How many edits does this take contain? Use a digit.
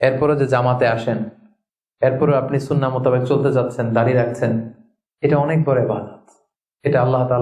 0